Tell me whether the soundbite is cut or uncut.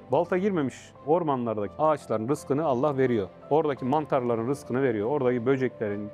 cut